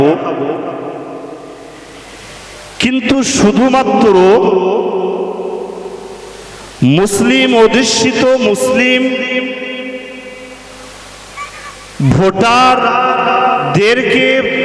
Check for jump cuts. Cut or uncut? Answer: uncut